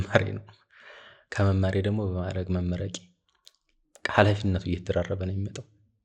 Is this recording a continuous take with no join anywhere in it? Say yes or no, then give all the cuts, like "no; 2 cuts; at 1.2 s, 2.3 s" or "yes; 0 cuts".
yes; 0 cuts